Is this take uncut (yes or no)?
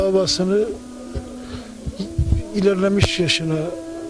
no